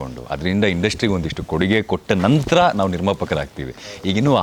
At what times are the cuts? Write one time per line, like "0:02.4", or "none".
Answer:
none